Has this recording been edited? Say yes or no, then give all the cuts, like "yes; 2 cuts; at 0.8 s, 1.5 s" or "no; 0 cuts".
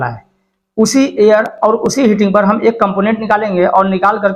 no; 0 cuts